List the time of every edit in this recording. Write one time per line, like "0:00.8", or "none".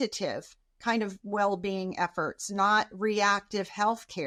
none